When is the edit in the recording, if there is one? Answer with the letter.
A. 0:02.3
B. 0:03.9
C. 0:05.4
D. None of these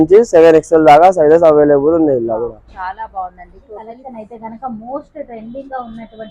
B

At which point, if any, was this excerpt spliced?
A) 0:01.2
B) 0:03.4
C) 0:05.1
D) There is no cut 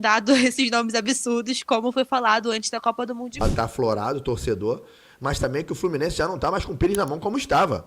B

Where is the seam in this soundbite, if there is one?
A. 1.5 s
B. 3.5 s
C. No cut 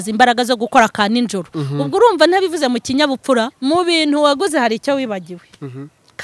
B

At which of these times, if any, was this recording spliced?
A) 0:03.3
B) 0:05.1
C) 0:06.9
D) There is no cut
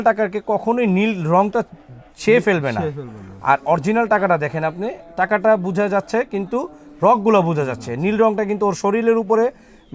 D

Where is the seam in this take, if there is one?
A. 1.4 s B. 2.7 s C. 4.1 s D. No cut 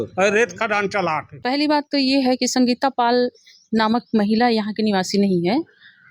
A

